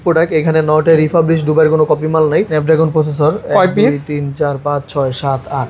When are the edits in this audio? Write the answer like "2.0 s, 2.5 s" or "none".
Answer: 2.5 s